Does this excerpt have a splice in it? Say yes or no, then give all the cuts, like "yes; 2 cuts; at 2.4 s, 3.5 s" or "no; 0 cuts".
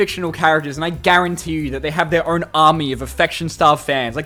no; 0 cuts